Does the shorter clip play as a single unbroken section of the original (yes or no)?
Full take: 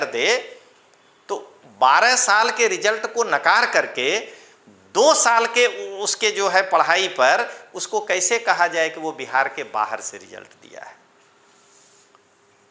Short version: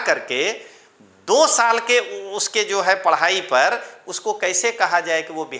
yes